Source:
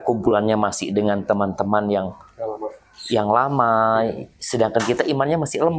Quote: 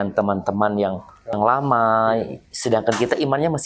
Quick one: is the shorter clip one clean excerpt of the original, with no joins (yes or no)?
no